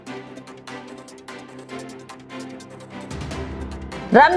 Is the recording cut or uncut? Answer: uncut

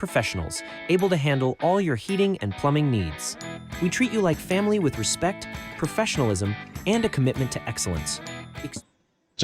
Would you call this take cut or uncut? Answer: uncut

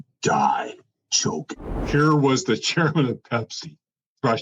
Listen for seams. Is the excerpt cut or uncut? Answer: cut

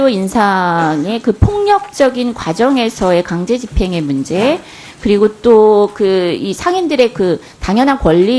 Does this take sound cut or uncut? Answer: cut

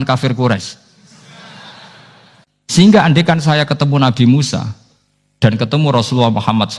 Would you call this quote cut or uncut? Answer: cut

